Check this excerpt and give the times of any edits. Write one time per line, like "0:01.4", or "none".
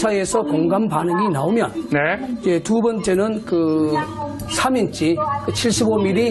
0:05.1